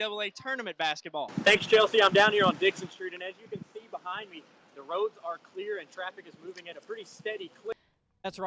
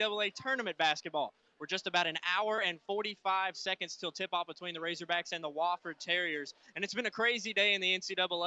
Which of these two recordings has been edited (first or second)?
first